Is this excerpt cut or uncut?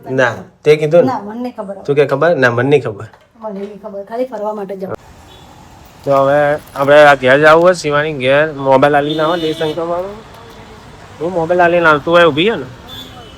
cut